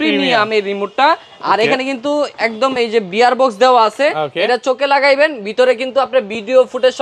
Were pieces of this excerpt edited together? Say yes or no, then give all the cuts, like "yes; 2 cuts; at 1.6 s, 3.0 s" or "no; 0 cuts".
no; 0 cuts